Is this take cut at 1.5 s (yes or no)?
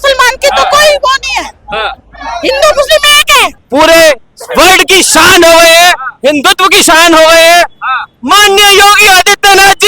no